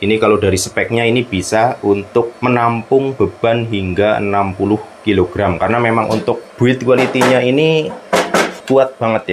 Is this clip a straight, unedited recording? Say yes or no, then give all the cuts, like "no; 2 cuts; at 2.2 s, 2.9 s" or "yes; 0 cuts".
yes; 0 cuts